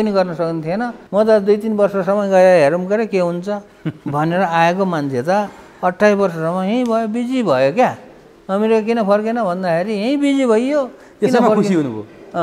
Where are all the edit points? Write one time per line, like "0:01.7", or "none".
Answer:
0:00.9